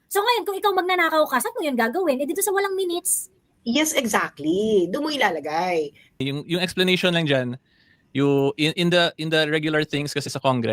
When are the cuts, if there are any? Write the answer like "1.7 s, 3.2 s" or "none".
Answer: 6.2 s